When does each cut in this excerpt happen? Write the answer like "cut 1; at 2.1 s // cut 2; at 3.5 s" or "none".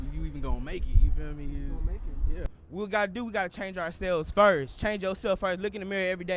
cut 1; at 2.6 s